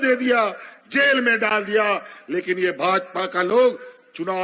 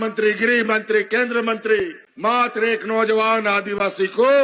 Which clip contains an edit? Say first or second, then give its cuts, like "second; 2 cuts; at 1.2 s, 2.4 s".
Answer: second; 1 cut; at 2.0 s